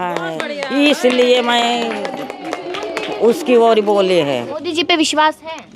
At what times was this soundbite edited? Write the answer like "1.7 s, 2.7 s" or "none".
4.5 s